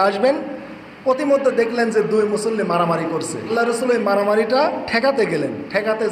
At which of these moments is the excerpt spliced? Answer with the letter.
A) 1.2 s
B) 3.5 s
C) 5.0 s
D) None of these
B